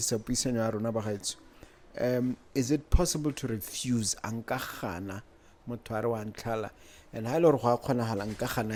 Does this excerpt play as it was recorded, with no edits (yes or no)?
yes